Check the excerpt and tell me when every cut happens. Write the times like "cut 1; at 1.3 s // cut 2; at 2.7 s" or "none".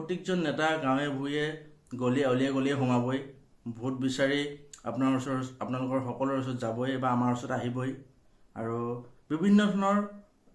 none